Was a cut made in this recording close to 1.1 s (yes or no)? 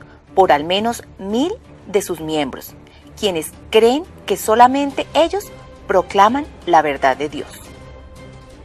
yes